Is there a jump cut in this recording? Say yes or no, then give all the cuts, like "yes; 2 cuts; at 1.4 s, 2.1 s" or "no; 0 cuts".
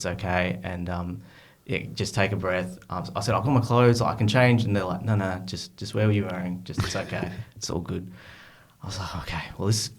no; 0 cuts